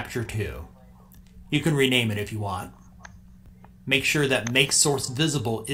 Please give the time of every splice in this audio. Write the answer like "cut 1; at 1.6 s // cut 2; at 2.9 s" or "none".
none